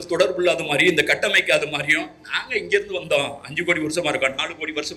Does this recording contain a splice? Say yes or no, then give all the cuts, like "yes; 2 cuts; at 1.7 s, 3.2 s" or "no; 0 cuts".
no; 0 cuts